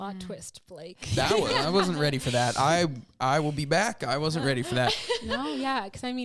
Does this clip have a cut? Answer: no; 0 cuts

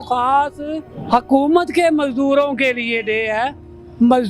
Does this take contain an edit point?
no; 0 cuts

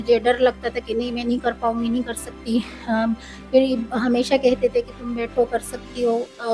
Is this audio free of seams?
yes; 0 cuts

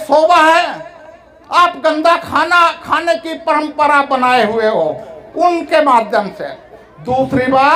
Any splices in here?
no; 0 cuts

